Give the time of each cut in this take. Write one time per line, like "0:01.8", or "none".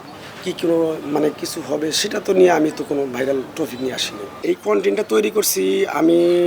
0:04.4